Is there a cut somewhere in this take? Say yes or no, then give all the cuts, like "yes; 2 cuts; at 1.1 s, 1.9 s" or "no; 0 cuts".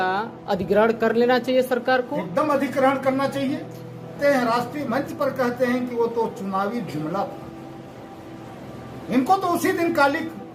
yes; 1 cut; at 4.2 s